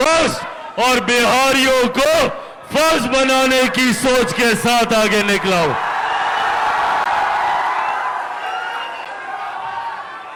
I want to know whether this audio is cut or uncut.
uncut